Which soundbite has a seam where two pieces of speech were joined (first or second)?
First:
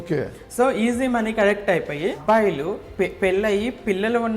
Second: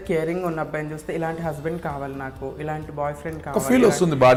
first